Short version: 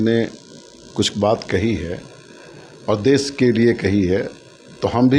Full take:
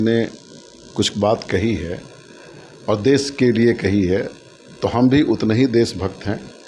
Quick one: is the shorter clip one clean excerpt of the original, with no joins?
yes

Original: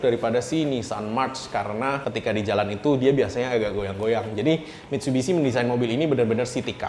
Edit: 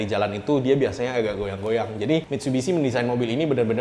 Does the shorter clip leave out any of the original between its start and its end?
yes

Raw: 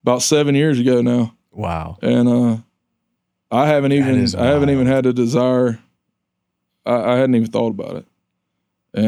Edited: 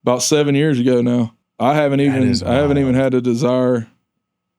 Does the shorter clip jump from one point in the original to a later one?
yes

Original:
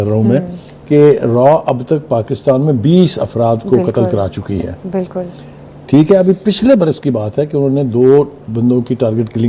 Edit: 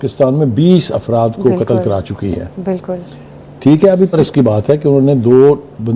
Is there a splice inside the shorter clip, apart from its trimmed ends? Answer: yes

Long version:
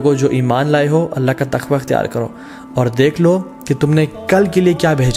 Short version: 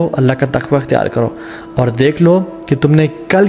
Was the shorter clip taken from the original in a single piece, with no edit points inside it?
yes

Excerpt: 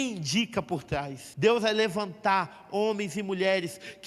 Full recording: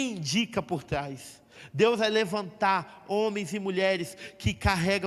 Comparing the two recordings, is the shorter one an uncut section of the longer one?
no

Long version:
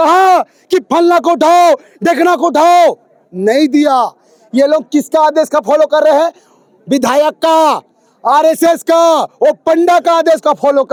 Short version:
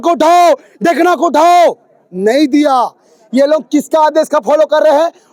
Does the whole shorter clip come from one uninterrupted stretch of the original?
yes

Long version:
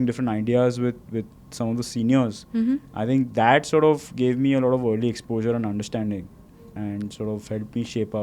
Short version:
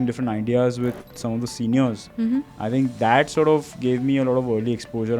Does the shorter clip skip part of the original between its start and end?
yes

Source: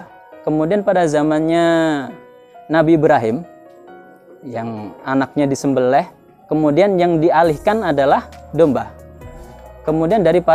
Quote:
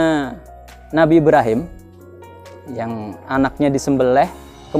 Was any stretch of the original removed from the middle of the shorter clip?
no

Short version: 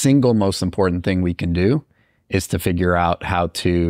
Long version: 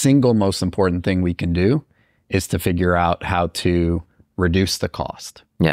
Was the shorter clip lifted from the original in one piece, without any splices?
yes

